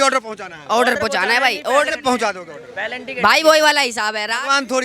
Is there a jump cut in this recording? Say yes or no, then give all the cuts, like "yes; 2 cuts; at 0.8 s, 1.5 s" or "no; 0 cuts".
no; 0 cuts